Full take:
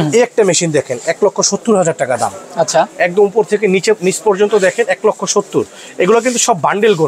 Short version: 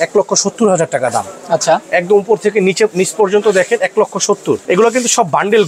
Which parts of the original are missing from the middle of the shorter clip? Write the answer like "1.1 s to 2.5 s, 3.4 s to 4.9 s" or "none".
5.7 s to 5.9 s